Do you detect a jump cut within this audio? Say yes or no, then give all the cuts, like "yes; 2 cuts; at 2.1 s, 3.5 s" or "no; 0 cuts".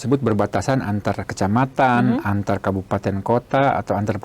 no; 0 cuts